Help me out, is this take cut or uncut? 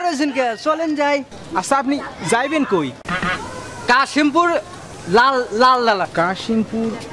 uncut